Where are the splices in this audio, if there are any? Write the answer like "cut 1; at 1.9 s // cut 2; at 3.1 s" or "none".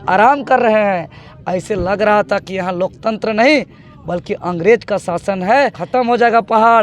cut 1; at 5.8 s